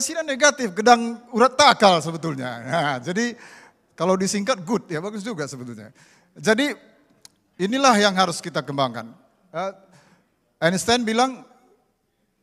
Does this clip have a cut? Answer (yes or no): no